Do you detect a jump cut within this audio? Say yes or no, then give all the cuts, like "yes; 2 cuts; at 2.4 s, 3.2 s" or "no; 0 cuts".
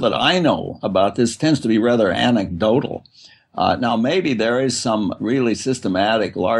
no; 0 cuts